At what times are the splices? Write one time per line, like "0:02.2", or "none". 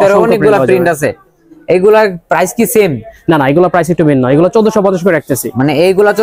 none